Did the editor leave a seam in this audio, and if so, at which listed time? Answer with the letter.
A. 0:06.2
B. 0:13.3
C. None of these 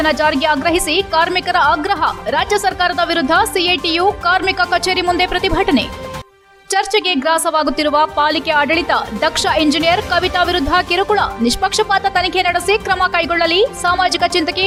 C